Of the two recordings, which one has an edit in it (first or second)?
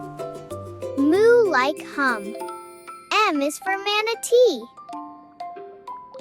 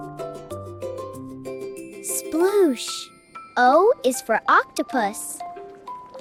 first